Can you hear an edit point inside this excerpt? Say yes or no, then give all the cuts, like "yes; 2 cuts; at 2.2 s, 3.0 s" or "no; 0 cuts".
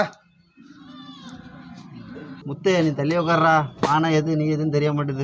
yes; 1 cut; at 2.4 s